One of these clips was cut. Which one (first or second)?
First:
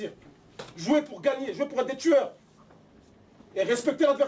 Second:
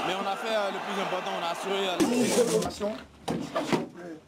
second